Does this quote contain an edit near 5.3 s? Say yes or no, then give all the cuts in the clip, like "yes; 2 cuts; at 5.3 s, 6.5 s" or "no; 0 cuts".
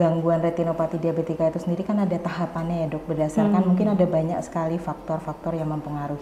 no; 0 cuts